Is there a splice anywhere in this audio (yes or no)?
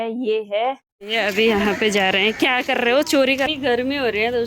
yes